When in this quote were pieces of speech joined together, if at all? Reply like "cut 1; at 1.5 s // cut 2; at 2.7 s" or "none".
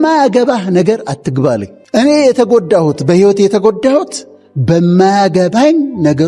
cut 1; at 1.8 s